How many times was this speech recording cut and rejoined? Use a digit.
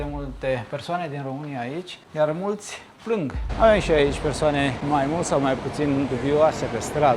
2